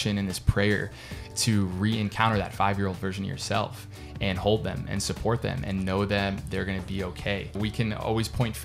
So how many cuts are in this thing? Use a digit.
1